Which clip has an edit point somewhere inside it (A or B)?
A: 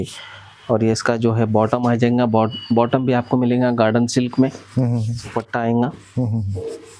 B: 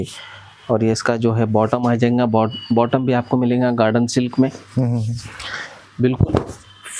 A